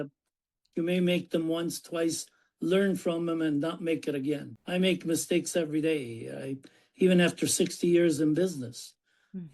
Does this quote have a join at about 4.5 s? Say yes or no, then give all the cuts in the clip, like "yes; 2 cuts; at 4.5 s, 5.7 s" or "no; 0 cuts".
yes; 1 cut; at 4.5 s